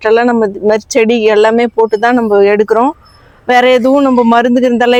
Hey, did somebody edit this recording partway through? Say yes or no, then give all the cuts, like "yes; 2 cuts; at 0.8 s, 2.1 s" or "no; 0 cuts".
no; 0 cuts